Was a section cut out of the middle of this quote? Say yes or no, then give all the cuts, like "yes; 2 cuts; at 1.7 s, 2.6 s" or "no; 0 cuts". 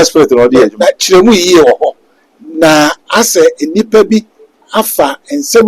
no; 0 cuts